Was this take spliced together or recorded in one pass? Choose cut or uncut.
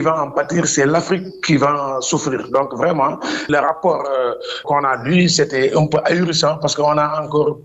cut